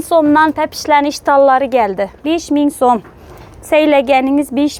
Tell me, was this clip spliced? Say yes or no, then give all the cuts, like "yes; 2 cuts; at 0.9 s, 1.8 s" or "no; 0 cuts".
no; 0 cuts